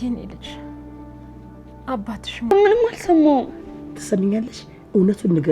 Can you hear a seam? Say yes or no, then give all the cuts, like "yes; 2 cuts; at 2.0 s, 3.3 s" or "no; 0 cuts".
yes; 1 cut; at 2.5 s